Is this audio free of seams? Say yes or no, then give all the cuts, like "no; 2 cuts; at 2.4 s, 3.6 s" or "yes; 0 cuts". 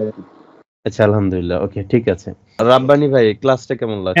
no; 1 cut; at 2.4 s